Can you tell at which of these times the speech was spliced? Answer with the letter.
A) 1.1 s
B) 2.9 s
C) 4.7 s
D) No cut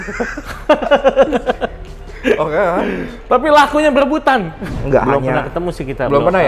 C